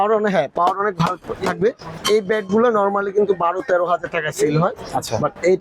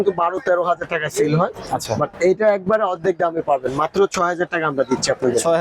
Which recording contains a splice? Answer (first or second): first